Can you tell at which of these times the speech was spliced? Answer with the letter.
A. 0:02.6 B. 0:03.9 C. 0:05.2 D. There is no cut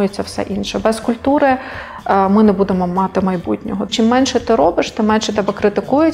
B